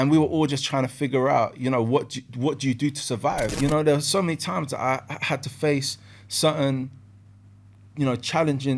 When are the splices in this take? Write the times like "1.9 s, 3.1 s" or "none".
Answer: 3.5 s